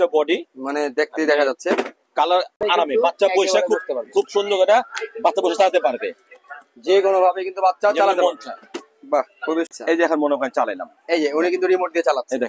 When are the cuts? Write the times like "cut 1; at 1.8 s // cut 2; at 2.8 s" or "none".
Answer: cut 1; at 2.6 s // cut 2; at 9.7 s